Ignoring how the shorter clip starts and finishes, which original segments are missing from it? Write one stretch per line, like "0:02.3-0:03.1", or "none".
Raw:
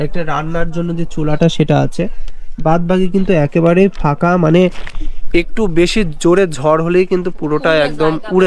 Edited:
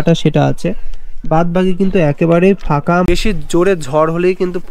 0:04.4-0:05.8